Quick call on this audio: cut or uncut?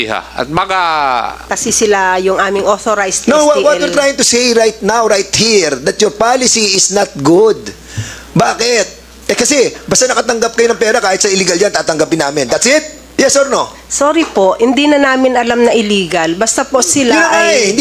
cut